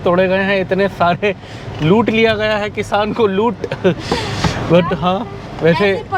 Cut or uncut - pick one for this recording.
uncut